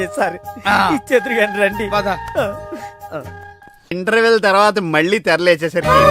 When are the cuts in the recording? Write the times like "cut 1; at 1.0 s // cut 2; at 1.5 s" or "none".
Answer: cut 1; at 3.9 s